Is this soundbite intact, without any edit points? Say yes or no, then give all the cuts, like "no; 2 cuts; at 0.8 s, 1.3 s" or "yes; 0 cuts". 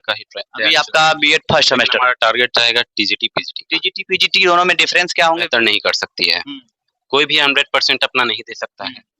no; 1 cut; at 5.5 s